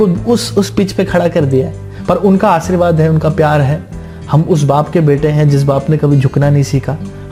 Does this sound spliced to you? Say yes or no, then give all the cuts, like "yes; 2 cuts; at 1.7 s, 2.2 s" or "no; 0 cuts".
no; 0 cuts